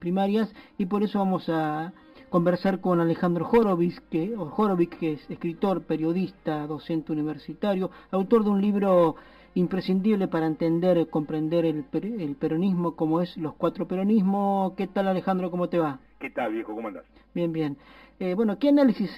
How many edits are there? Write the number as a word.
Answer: one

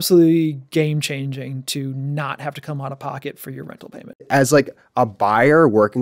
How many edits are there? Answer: one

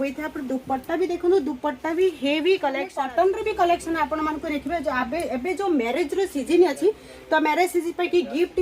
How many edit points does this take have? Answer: one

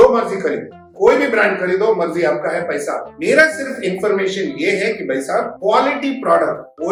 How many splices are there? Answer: zero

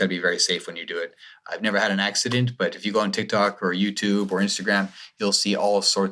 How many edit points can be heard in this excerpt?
zero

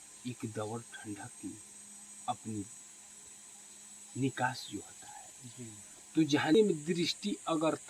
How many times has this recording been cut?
one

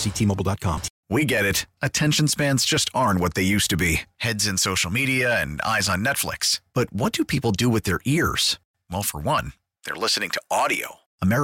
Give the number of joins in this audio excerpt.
one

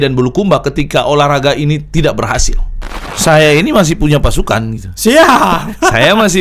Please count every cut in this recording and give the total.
one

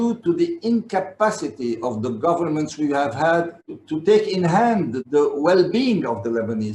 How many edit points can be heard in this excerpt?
one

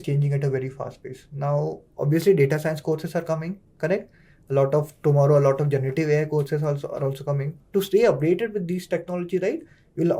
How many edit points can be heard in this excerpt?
one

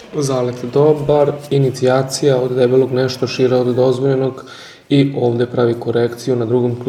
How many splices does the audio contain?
zero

